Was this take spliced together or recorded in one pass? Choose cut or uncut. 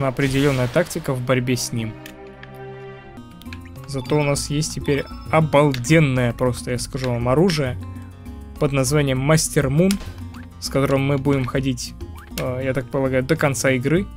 cut